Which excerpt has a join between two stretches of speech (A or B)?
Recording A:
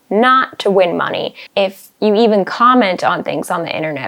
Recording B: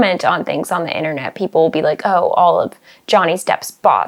A